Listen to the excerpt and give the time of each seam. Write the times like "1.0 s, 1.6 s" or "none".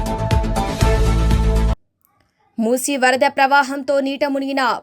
1.8 s